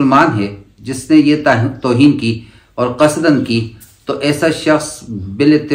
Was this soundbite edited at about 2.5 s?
no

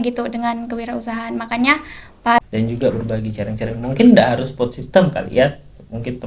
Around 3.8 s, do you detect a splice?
no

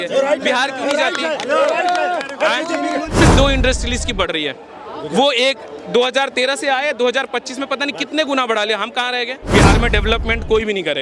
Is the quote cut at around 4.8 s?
no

